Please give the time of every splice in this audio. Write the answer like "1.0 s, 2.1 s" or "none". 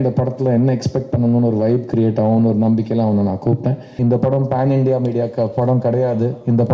4.0 s